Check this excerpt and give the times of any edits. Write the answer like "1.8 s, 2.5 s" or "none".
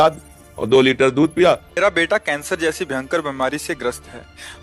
1.7 s